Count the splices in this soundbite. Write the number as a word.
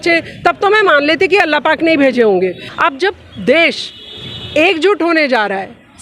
one